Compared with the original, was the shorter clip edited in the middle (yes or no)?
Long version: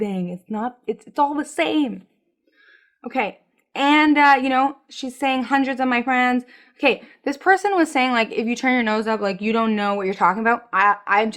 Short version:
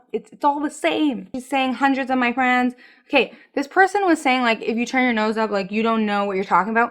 yes